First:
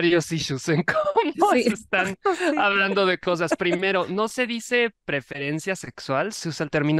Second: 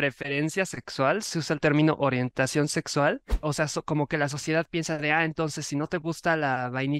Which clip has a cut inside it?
second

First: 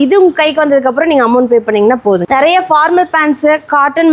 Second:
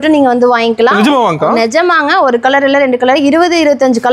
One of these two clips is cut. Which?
first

